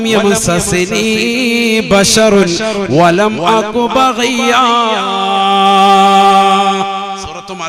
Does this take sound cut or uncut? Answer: uncut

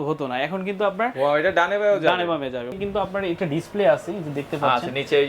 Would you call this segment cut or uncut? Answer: cut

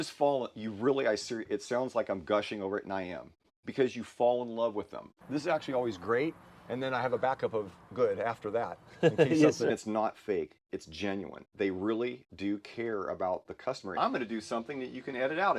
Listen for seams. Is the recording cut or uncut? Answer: cut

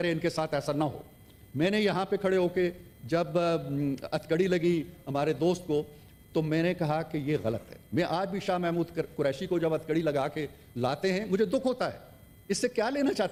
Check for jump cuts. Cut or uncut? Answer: uncut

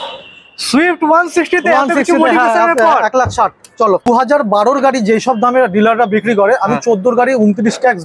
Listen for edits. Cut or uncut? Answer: cut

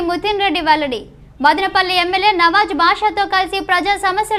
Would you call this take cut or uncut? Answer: uncut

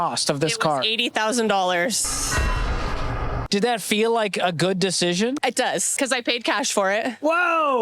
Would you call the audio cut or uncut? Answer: uncut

